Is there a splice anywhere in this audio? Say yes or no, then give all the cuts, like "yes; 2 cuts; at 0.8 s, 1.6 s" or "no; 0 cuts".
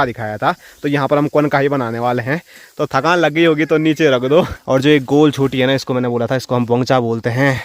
yes; 1 cut; at 4.5 s